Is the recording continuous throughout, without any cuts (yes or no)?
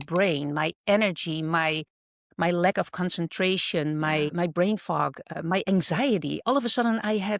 yes